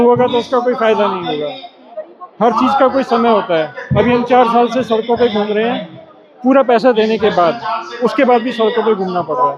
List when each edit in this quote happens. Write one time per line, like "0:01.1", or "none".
none